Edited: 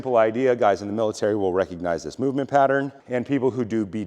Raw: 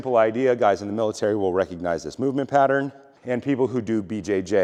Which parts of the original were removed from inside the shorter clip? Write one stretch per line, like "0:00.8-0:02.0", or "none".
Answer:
0:03.0-0:03.1